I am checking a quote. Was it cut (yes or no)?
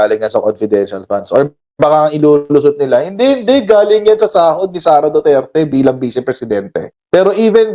no